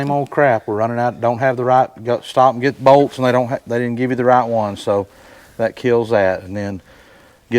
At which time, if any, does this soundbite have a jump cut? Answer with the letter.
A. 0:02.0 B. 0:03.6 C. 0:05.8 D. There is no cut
D